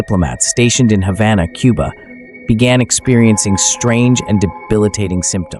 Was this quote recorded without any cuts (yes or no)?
yes